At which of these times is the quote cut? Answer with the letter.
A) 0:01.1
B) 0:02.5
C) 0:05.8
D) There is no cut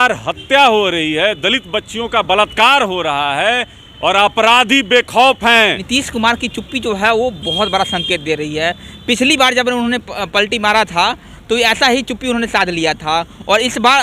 C